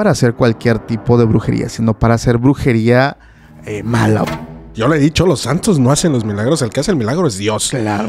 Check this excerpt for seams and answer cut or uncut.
cut